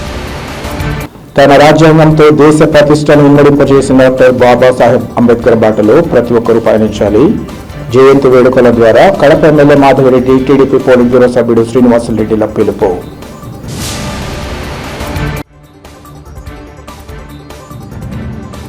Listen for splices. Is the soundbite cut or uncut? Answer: cut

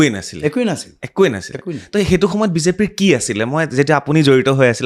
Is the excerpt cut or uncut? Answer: uncut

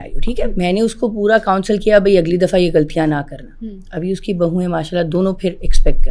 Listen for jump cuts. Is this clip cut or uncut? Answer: uncut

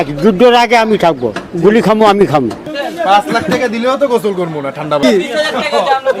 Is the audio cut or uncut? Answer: cut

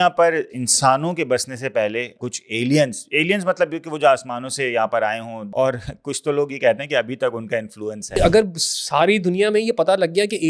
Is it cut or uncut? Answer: cut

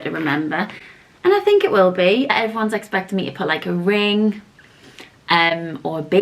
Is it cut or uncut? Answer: cut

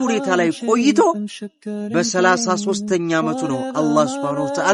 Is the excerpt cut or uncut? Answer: uncut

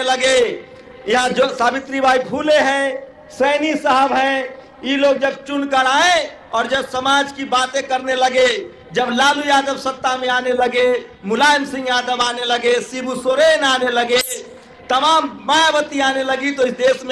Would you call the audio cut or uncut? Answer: uncut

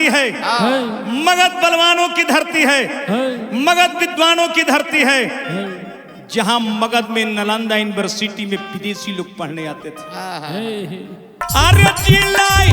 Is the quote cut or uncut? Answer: cut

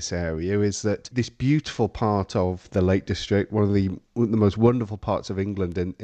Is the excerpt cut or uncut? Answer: cut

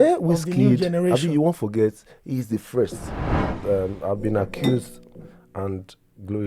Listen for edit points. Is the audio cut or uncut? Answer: cut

